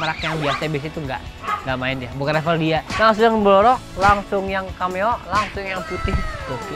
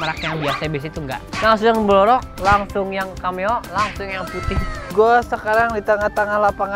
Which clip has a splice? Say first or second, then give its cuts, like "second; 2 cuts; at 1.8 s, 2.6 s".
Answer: second; 2 cuts; at 1.3 s, 4.9 s